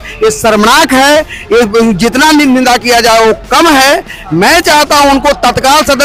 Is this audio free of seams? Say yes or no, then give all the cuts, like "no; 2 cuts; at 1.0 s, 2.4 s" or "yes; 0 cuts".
yes; 0 cuts